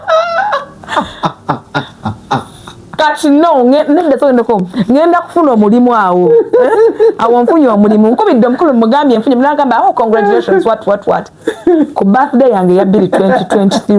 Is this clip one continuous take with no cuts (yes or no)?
yes